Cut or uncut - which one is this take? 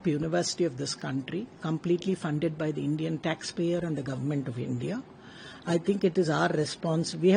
uncut